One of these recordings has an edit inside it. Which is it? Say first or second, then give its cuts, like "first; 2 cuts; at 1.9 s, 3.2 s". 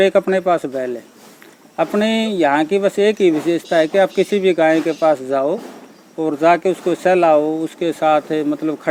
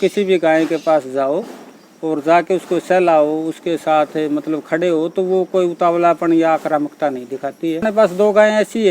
second; 1 cut; at 7.8 s